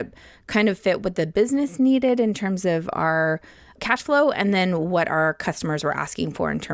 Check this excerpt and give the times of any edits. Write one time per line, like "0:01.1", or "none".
0:03.7